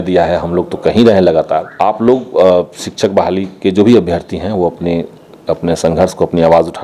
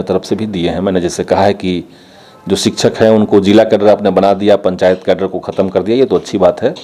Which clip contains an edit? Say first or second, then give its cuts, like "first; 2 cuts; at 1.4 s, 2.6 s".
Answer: first; 1 cut; at 1.7 s